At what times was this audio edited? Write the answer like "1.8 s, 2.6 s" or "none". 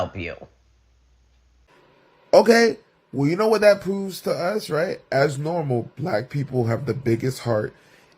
1.7 s